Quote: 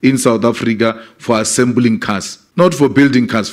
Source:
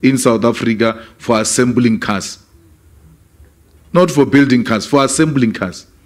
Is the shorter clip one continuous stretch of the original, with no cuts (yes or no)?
no